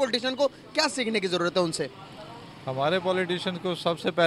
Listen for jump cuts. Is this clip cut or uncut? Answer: uncut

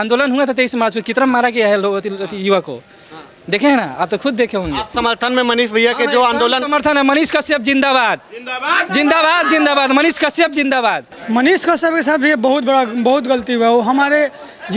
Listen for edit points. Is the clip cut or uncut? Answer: cut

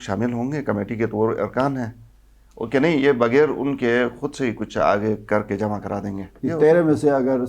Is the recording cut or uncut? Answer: cut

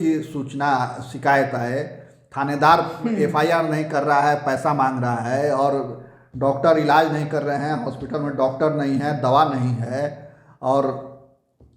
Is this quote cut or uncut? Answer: uncut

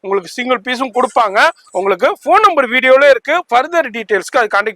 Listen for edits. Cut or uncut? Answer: uncut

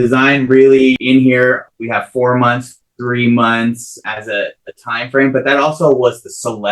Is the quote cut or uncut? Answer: cut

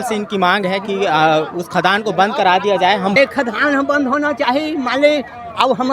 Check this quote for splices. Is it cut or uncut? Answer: cut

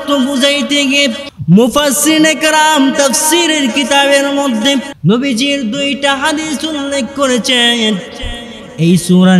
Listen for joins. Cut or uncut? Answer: cut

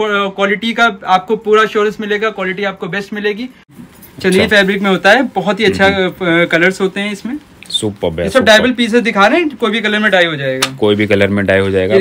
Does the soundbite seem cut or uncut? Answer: cut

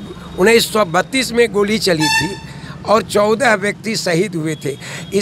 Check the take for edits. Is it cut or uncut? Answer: uncut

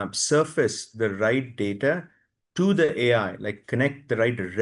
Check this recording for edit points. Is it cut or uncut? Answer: uncut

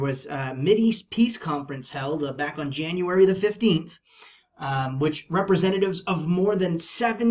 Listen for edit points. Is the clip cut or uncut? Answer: uncut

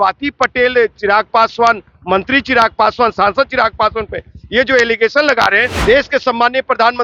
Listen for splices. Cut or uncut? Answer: cut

